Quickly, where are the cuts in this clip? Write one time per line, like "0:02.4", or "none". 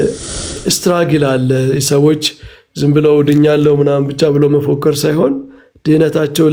none